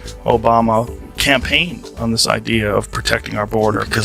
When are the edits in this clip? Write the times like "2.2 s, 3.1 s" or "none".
none